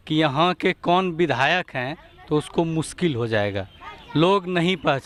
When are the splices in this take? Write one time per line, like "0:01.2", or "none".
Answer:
none